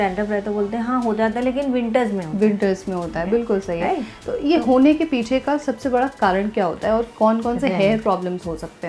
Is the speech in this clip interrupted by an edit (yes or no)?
no